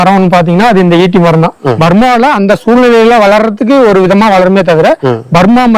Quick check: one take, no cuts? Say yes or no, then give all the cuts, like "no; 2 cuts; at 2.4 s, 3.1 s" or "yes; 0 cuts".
no; 1 cut; at 1.7 s